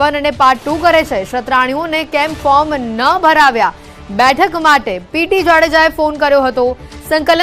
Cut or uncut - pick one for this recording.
cut